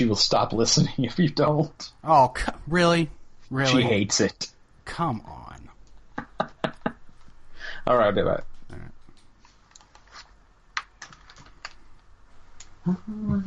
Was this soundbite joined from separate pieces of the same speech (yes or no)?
no